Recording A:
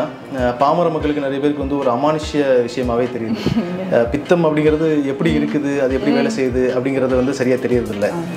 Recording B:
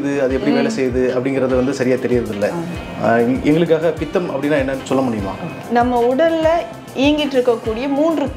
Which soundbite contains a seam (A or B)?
B